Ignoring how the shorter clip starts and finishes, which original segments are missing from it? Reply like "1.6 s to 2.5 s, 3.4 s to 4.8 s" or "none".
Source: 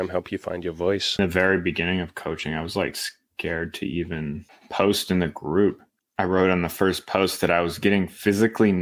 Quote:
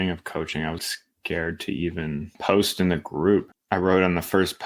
2.7 s to 2.9 s, 4.5 s to 4.6 s, 5.9 s to 6.0 s